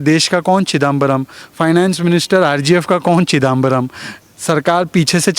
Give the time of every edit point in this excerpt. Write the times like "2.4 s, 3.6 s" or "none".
none